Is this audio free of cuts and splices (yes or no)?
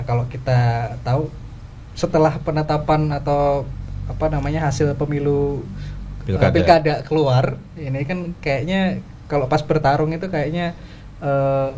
yes